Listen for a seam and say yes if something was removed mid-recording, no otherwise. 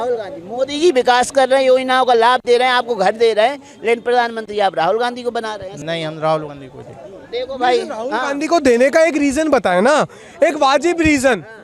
yes